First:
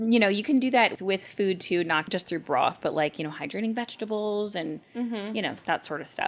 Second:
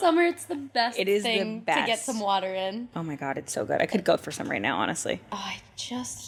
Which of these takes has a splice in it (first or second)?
first